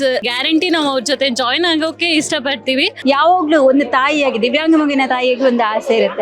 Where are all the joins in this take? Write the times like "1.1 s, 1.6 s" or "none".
2.9 s